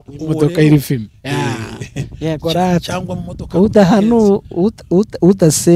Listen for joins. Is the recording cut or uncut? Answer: uncut